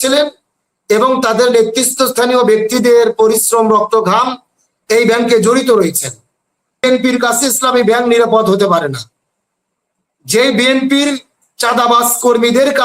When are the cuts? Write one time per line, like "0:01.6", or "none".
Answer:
0:06.8